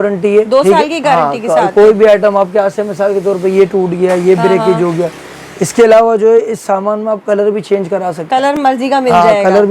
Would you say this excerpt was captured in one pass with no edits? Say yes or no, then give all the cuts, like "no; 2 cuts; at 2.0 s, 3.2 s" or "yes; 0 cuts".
yes; 0 cuts